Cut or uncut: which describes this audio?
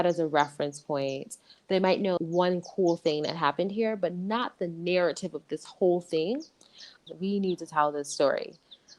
cut